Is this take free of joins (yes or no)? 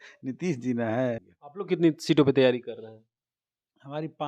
no